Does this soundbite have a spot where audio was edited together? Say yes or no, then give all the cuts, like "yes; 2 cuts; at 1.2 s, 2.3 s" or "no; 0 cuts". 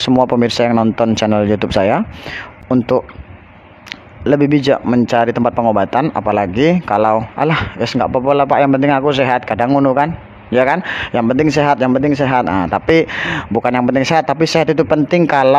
no; 0 cuts